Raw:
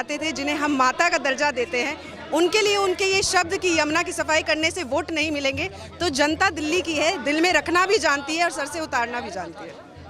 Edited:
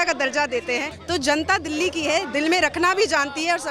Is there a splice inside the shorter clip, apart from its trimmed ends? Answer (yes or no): yes